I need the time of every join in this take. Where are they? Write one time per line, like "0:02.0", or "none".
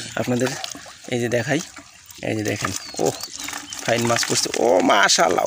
none